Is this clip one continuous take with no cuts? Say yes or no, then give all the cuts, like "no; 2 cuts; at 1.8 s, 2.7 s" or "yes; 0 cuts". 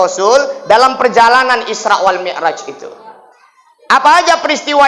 yes; 0 cuts